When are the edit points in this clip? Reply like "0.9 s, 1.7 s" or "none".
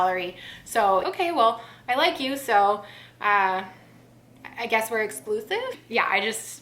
1.0 s, 5.7 s